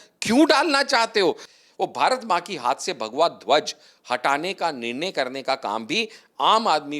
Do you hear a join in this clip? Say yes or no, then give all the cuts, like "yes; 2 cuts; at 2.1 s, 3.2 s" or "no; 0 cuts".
yes; 1 cut; at 1.4 s